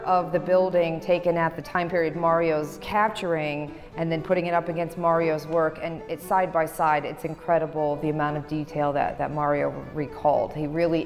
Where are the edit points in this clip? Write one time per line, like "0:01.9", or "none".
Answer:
0:01.6
0:02.8